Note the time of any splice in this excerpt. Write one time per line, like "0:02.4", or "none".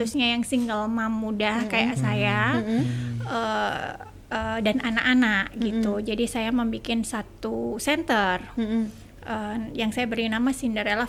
none